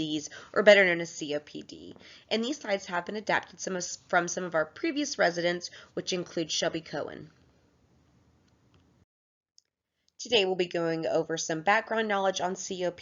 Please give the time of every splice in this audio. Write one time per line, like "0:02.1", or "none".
0:01.3

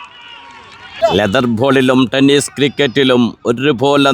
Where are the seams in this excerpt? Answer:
0:00.9

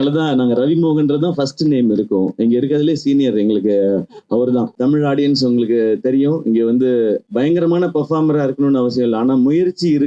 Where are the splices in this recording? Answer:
0:04.8
0:07.3

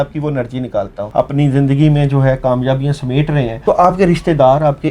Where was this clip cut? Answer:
0:01.0
0:03.5

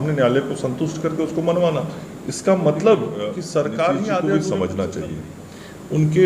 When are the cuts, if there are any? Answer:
0:04.3

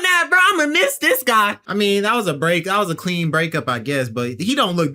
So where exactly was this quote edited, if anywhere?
0:01.6

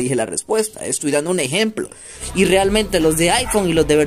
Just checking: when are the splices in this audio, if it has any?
0:02.2

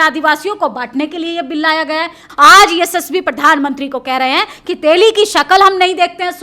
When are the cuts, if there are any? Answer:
0:02.2

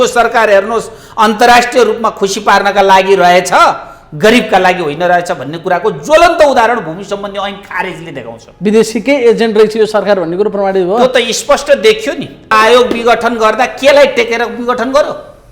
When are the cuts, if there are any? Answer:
0:12.5

